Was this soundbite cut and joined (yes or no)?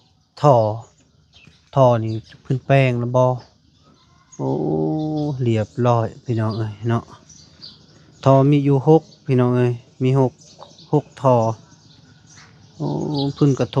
no